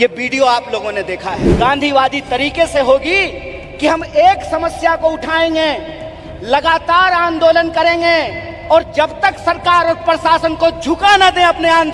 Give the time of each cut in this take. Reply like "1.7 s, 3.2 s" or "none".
1.5 s